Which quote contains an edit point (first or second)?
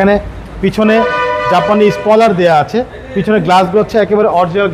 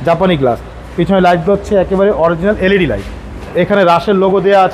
second